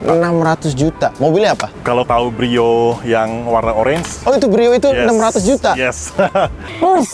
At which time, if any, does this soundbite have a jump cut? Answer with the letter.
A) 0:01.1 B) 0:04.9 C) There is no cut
C